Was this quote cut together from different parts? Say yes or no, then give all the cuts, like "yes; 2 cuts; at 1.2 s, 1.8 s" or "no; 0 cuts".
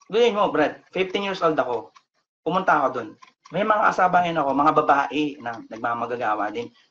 no; 0 cuts